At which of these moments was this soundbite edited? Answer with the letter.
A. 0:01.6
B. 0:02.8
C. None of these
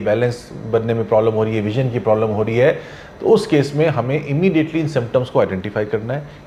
C